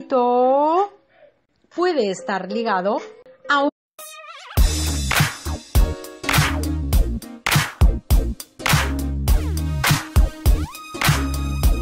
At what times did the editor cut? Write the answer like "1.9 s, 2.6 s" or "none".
none